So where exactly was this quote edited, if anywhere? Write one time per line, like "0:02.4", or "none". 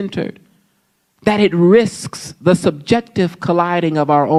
none

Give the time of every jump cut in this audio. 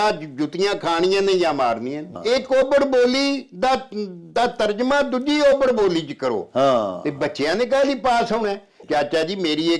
0:02.1
0:08.8

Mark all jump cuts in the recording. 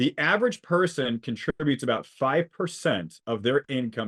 none

